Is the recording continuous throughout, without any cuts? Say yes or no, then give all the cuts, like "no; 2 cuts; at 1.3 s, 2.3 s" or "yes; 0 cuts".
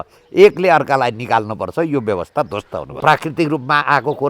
no; 1 cut; at 2.8 s